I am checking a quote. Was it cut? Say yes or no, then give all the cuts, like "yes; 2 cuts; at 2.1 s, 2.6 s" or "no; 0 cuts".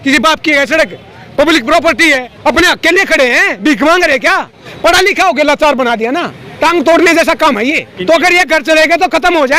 yes; 3 cuts; at 2.3 s, 4.6 s, 7.9 s